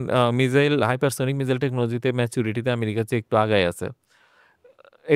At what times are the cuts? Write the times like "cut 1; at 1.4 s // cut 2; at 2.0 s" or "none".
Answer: none